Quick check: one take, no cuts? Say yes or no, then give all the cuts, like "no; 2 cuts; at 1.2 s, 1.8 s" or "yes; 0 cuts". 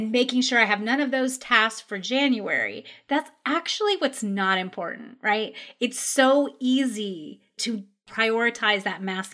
no; 1 cut; at 8.1 s